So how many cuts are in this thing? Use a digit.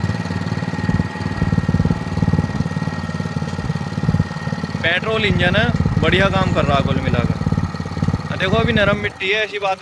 0